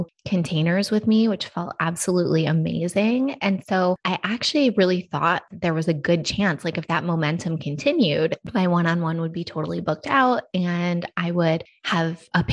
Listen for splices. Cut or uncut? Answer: cut